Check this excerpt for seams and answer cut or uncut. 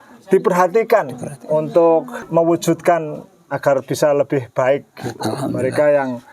cut